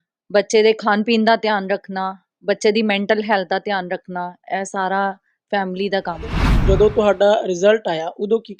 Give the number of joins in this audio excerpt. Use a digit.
1